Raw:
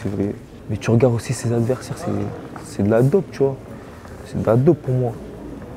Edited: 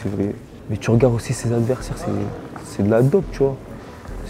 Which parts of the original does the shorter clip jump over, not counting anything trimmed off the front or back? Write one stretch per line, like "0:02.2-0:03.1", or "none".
none